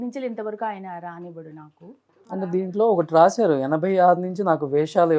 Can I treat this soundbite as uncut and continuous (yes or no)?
no